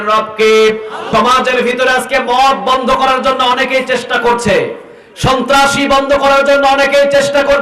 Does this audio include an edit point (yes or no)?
yes